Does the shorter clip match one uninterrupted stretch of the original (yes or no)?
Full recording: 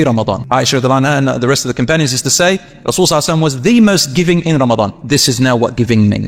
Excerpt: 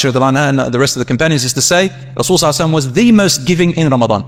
yes